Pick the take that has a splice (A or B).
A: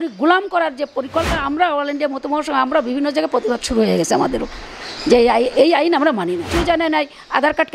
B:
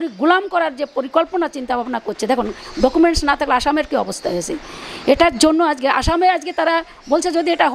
A